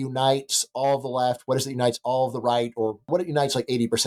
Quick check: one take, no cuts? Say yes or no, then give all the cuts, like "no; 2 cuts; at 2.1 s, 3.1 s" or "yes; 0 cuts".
no; 1 cut; at 3.0 s